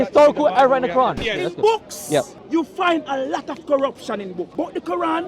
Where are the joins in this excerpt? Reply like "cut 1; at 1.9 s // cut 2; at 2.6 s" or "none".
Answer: cut 1; at 1.2 s // cut 2; at 2.4 s // cut 3; at 4.5 s